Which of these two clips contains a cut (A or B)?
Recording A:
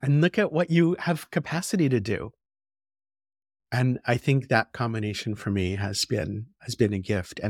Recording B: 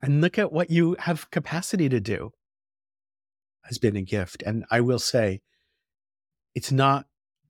B